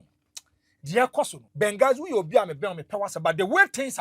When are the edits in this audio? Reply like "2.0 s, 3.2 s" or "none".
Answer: 1.4 s